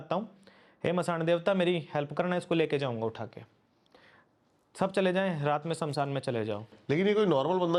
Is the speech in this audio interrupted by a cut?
no; 0 cuts

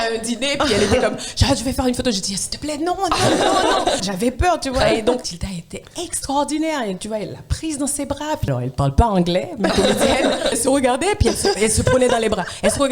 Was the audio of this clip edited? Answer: yes; 4 cuts; at 4.0 s, 5.4 s, 8.5 s, 10.6 s

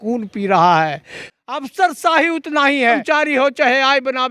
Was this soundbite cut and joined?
yes; 2 cuts; at 1.2 s, 3.0 s

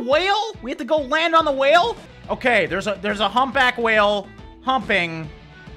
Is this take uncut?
no; 1 cut; at 2.0 s

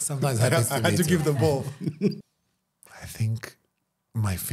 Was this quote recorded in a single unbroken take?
no; 1 cut; at 2.2 s

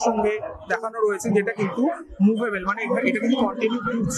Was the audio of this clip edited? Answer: no; 0 cuts

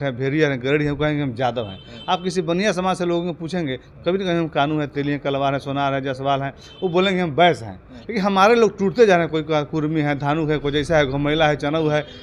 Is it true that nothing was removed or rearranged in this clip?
yes; 0 cuts

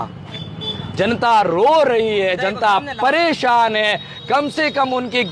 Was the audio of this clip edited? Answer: no; 0 cuts

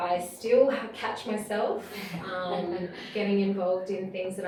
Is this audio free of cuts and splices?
yes; 0 cuts

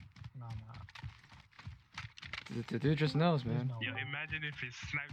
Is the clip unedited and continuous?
yes; 0 cuts

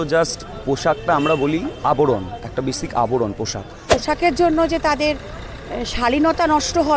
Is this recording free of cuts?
no; 1 cut; at 4.0 s

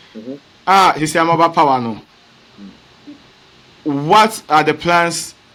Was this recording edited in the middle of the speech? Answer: no; 0 cuts

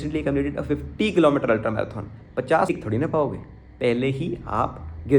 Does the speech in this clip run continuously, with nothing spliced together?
no; 1 cut; at 2.7 s

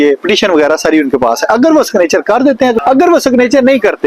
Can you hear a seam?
yes; 1 cut; at 2.8 s

